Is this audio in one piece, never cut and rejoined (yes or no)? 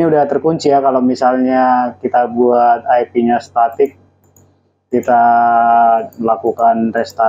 yes